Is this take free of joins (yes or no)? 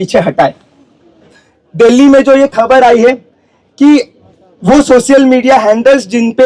no